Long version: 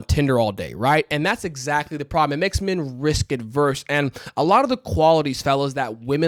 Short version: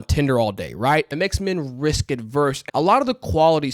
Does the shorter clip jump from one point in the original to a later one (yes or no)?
yes